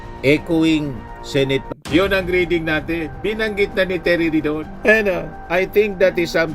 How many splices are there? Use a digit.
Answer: 1